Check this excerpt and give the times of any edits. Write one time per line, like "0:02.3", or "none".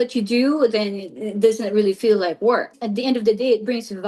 0:02.8